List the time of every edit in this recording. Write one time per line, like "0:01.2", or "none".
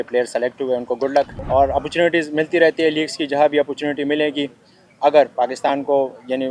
0:01.4